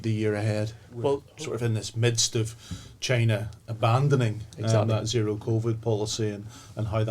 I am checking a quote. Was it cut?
yes; 1 cut; at 1.3 s

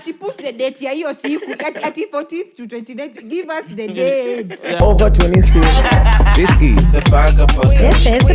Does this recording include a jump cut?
yes; 1 cut; at 4.8 s

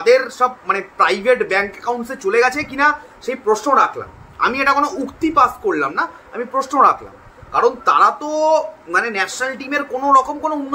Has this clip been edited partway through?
no; 0 cuts

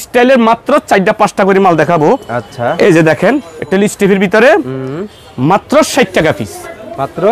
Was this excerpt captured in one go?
yes; 0 cuts

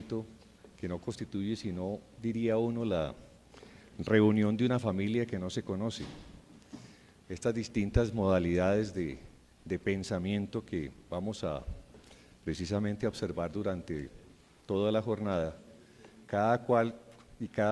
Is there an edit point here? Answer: no; 0 cuts

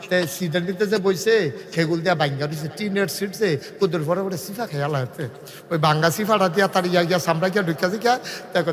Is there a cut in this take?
no; 0 cuts

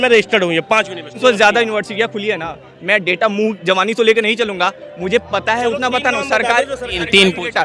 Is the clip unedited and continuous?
no; 1 cut; at 1.2 s

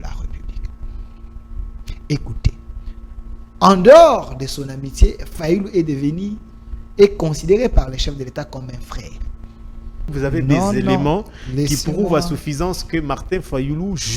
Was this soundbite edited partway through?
yes; 1 cut; at 10.1 s

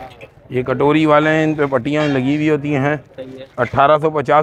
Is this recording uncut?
yes; 0 cuts

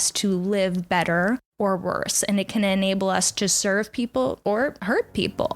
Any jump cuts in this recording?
yes; 2 cuts; at 1.5 s, 4.7 s

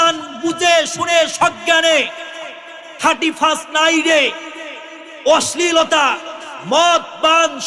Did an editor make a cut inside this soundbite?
no; 0 cuts

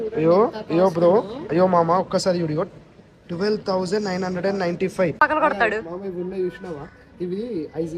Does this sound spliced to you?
yes; 1 cut; at 5.2 s

